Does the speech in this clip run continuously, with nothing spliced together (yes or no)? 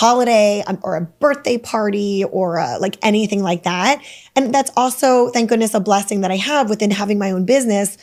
yes